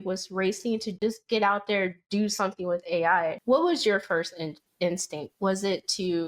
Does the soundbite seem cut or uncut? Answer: cut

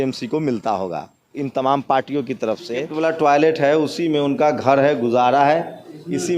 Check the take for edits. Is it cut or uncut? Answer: cut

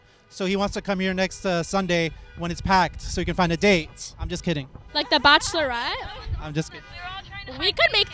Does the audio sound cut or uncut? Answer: uncut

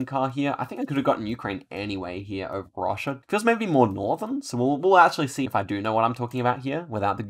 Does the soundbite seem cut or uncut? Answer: cut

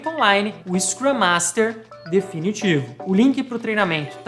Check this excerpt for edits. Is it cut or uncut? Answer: cut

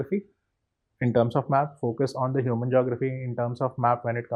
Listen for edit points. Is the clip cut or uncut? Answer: uncut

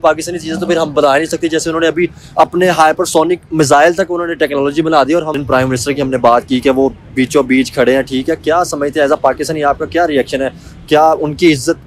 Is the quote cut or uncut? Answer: cut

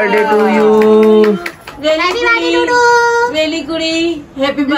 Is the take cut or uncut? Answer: cut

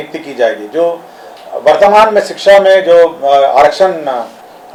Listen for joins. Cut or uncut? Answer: uncut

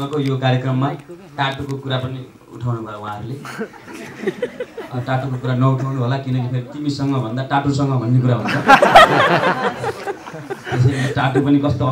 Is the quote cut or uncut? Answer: uncut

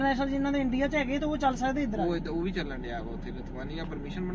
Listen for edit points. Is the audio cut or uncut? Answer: uncut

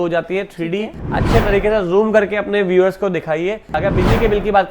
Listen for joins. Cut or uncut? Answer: cut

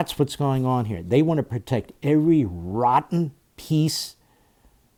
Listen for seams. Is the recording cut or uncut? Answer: uncut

